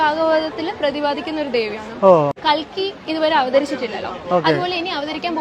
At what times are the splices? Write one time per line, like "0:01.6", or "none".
0:02.4